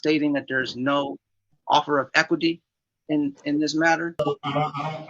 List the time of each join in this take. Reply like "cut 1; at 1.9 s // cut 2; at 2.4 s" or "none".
cut 1; at 4.1 s